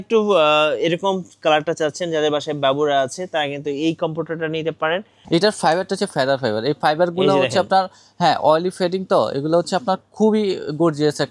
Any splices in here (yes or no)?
yes